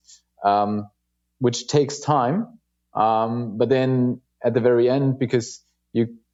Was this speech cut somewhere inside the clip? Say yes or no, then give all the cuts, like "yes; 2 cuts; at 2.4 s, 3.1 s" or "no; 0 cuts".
no; 0 cuts